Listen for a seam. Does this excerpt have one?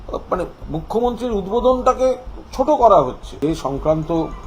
yes; 1 cut; at 3.2 s

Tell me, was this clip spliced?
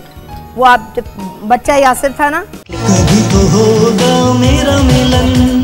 no; 0 cuts

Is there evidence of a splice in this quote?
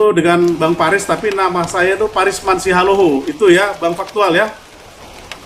no; 0 cuts

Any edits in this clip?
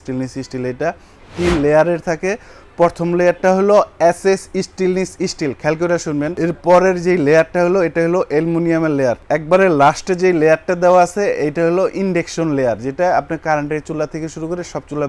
no; 0 cuts

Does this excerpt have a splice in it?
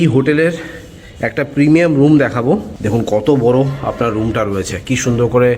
yes; 1 cut; at 2.7 s

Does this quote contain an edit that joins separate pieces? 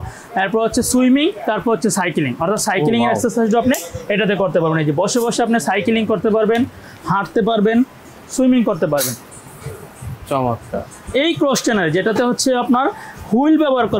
no; 0 cuts

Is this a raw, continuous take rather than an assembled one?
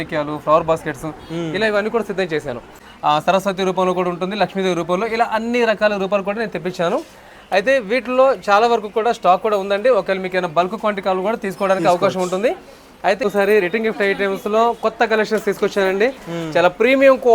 no; 2 cuts; at 2.8 s, 13.2 s

